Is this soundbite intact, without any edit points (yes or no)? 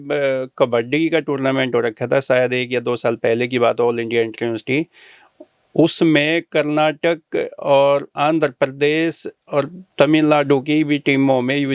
yes